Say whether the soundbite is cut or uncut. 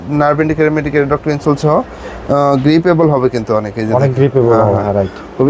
uncut